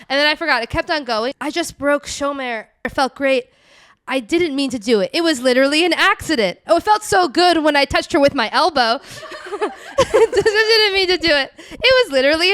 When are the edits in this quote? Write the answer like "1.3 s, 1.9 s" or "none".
1.4 s, 2.9 s